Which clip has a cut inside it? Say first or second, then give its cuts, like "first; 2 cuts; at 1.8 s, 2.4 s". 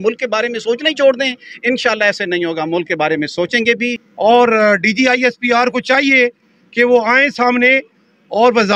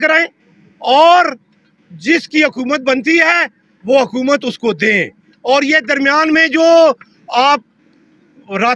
first; 1 cut; at 4.1 s